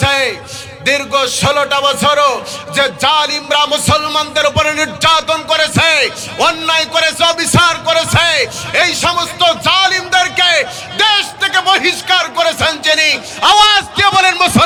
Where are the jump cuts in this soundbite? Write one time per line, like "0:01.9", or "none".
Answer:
none